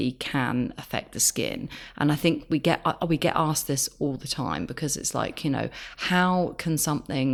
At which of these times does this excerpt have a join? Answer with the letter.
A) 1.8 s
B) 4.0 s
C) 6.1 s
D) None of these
D